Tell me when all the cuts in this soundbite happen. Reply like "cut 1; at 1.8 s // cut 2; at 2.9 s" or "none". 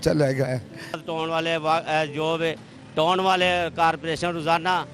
cut 1; at 1.0 s